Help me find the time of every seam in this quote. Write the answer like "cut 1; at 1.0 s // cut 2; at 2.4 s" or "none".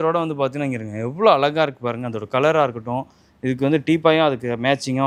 none